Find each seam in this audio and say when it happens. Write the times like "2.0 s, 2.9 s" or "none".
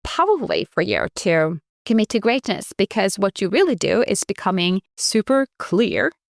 1.7 s, 4.9 s

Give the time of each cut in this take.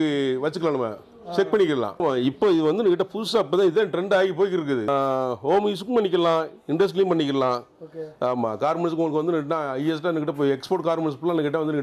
2.0 s, 4.9 s

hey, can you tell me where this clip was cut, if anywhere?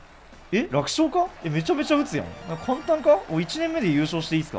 1.4 s

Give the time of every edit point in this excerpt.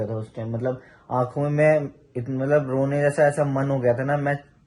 none

